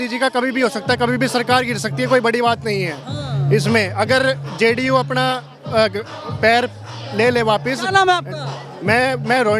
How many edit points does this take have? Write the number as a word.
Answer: zero